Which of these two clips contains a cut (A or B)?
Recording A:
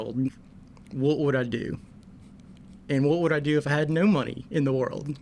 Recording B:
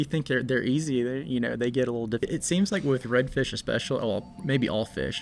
B